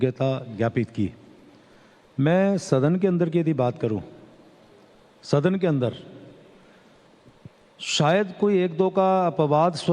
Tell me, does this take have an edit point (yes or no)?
yes